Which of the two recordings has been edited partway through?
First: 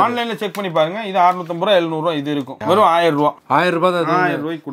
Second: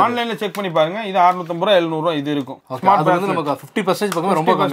first; 1 cut; at 2.5 s

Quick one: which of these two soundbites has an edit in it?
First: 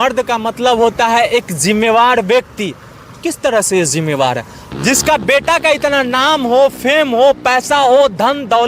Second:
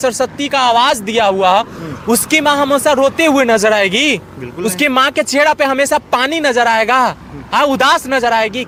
first; 1 cut; at 4.6 s

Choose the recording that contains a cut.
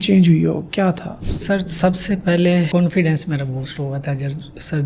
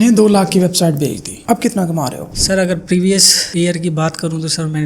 second; 1 cut; at 1.3 s

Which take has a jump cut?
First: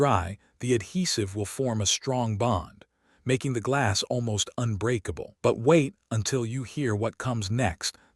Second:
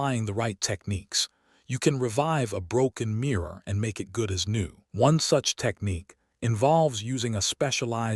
first; 1 cut; at 5.3 s

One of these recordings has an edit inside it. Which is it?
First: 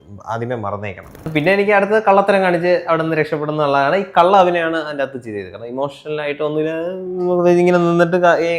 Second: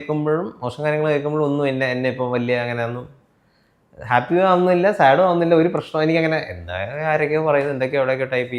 first; 1 cut; at 1.3 s

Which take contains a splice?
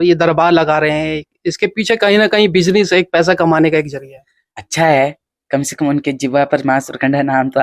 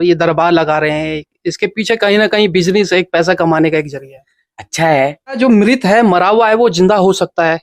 second; 1 cut; at 4.8 s

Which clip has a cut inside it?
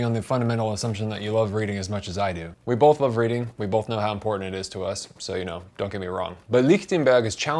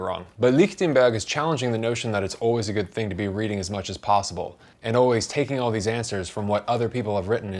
first; 1 cut; at 2.5 s

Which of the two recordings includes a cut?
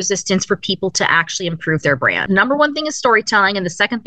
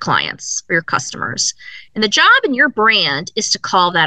first; 1 cut; at 2.3 s

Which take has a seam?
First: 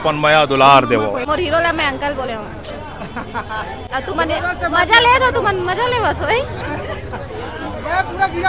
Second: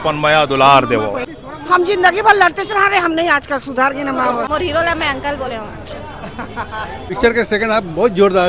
second; 3 cuts; at 1.2 s, 4.5 s, 7.1 s

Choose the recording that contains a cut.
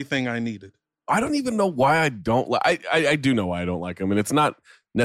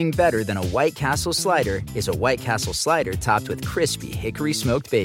first; 1 cut; at 1.0 s

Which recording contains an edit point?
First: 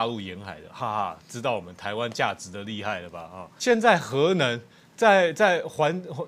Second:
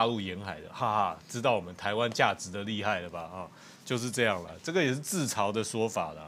first; 1 cut; at 3.4 s

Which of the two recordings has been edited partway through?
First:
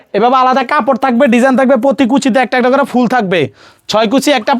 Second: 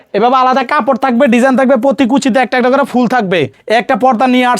second; 1 cut; at 3.6 s

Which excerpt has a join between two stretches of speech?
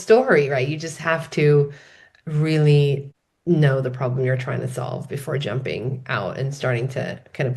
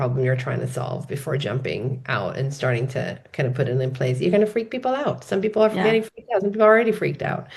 first; 1 cut; at 3.1 s

